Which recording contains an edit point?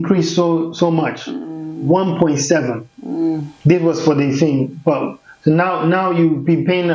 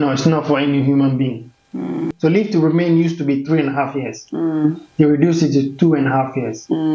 second; 1 cut; at 2.1 s

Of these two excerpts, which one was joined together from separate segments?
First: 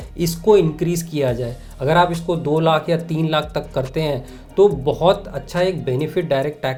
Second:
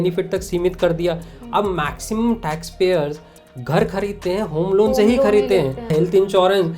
second; 1 cut; at 5.9 s

